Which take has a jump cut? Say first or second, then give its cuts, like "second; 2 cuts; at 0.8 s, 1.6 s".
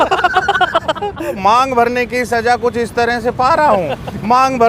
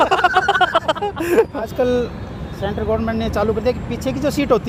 first; 1 cut; at 1.3 s